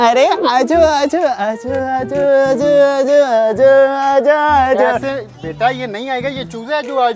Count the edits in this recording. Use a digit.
1